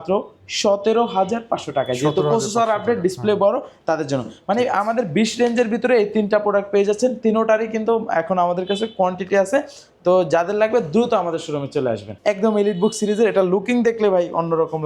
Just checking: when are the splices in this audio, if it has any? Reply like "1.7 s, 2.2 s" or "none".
none